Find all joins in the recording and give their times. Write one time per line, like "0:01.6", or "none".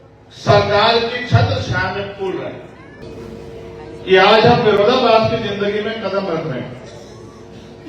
0:03.0